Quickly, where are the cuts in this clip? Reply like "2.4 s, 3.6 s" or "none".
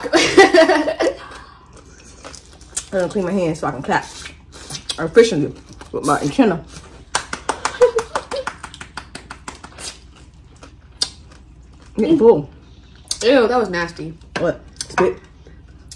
none